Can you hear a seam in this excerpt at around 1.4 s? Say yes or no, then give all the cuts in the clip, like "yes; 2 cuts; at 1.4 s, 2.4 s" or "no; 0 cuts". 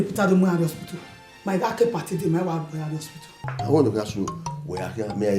no; 1 cut; at 3.4 s